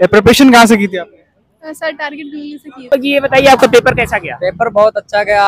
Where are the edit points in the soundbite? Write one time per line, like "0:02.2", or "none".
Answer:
0:02.8